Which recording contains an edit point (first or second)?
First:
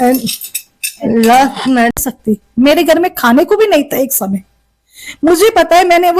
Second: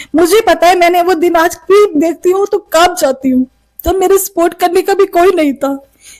first